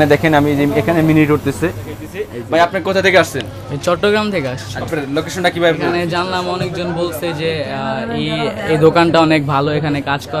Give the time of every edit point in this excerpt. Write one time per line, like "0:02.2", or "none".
0:02.1
0:04.8